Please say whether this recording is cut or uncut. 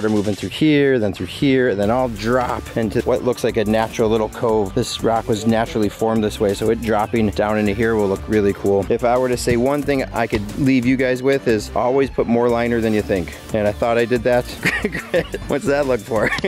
cut